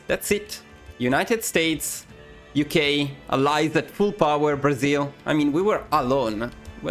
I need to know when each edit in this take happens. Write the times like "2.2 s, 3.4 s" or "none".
none